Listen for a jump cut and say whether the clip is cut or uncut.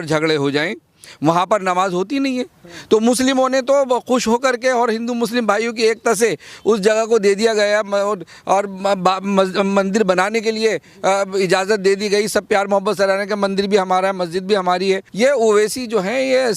cut